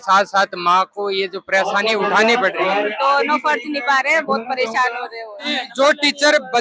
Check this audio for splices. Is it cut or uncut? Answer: cut